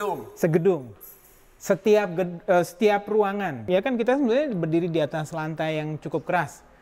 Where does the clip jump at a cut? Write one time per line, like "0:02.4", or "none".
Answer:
0:03.6